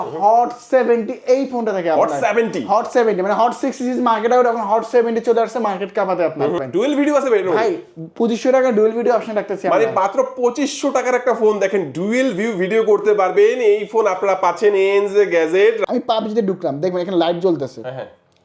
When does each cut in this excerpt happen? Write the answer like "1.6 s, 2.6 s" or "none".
6.6 s, 15.8 s